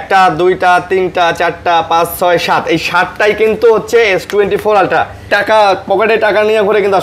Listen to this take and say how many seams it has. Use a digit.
1